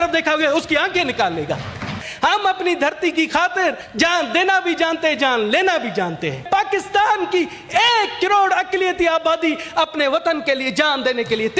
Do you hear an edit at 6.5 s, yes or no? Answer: yes